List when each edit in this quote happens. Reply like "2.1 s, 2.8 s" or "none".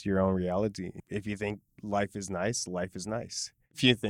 1.0 s